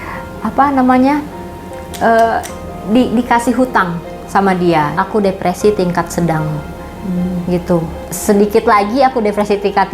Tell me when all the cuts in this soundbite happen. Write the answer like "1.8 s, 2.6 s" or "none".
4.9 s, 8.0 s